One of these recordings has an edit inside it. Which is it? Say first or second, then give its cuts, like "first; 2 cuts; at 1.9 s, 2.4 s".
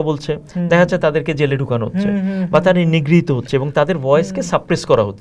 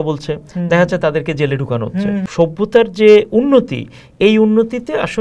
second; 1 cut; at 2.3 s